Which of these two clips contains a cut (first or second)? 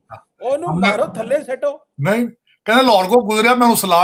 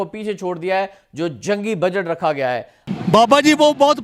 second